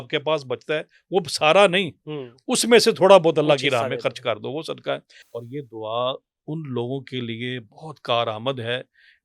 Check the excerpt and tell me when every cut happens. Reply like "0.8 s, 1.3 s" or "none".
5.2 s